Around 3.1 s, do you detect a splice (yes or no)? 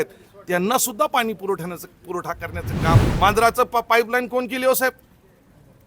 yes